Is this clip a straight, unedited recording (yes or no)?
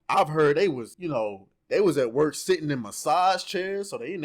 no